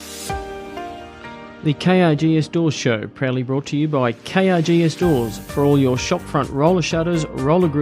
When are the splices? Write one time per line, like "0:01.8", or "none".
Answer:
0:01.5